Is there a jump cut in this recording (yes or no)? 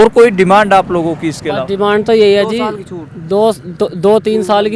no